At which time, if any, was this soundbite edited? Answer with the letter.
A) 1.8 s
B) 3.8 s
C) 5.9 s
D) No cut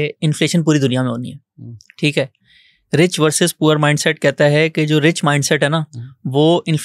D